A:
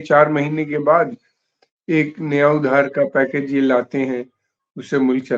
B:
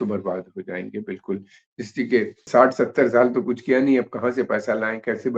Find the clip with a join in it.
B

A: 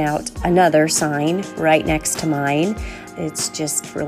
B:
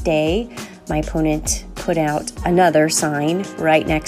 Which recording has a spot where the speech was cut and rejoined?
A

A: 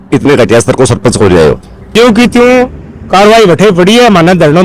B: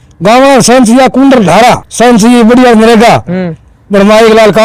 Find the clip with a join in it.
A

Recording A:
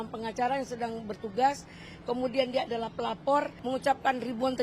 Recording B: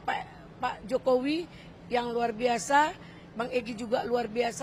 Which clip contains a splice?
A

